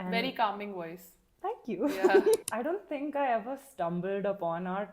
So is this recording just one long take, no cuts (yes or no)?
no